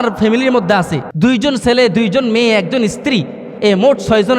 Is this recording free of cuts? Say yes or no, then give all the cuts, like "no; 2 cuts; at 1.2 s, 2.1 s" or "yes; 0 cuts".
no; 1 cut; at 1.0 s